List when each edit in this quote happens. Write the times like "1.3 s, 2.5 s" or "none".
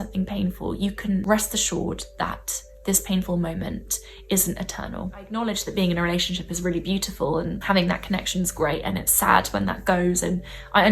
1.2 s, 5.3 s, 7.6 s